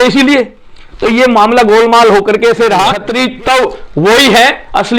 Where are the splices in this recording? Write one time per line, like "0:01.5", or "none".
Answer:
0:03.0